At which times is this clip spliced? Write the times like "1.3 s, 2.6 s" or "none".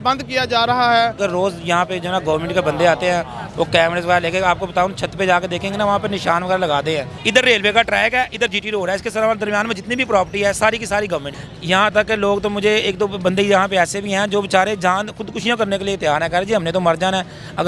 1.2 s, 7.1 s, 11.4 s